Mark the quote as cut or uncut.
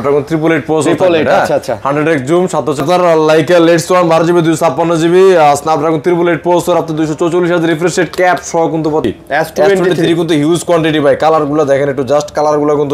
cut